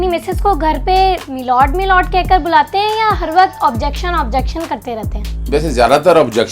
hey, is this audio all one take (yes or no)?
no